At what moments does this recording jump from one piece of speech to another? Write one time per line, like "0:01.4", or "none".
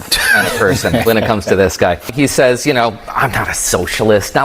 0:02.1